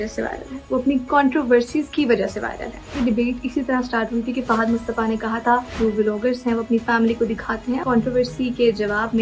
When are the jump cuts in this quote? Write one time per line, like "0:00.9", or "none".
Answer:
0:03.0
0:05.7
0:07.8